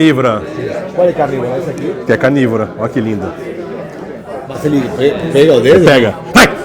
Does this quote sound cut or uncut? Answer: uncut